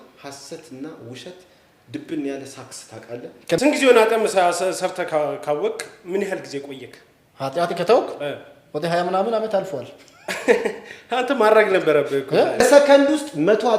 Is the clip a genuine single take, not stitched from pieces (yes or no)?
no